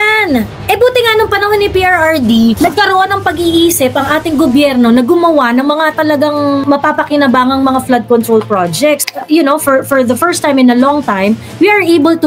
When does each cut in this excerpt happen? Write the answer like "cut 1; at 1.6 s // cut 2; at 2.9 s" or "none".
cut 1; at 2.6 s // cut 2; at 6.6 s